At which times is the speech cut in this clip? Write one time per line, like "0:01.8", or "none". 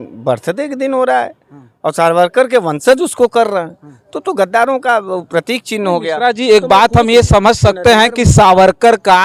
none